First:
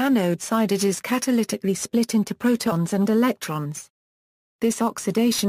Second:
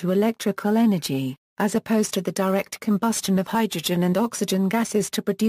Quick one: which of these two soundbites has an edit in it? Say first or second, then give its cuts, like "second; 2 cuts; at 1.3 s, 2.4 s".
first; 1 cut; at 3.2 s